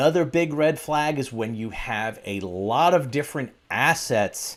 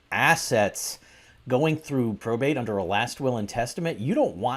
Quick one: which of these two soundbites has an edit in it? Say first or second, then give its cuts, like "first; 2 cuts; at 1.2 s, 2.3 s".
second; 1 cut; at 2.2 s